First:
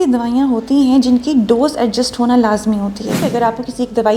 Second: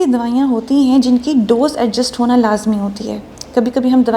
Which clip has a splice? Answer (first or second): first